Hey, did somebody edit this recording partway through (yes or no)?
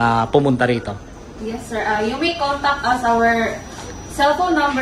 no